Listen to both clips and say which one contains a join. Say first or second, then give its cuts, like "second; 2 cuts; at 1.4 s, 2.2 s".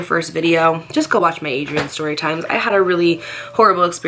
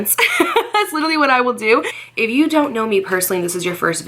second; 1 cut; at 2.0 s